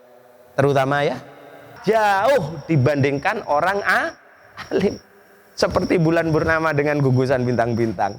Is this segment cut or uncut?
cut